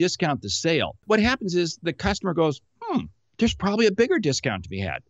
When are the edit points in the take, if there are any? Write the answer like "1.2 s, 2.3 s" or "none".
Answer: 1.0 s